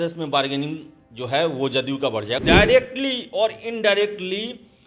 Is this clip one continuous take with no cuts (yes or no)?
no